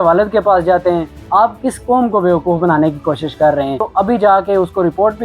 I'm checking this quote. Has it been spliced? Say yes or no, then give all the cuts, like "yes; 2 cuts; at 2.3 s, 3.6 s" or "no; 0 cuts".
yes; 2 cuts; at 1.1 s, 3.8 s